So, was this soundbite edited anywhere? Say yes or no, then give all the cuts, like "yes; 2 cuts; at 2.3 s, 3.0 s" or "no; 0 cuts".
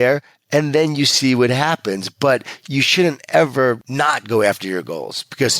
yes; 1 cut; at 3.8 s